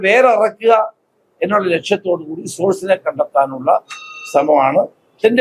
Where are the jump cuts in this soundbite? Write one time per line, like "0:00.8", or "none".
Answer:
none